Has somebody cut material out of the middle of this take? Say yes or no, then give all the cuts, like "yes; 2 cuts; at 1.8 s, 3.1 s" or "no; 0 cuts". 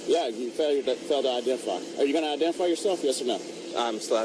no; 0 cuts